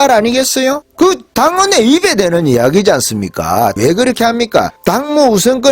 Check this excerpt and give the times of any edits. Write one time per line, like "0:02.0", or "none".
0:00.8
0:03.7
0:04.7